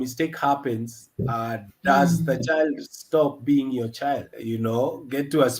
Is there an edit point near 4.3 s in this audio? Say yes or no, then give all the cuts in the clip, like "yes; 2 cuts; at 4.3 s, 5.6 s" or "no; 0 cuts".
yes; 1 cut; at 4.3 s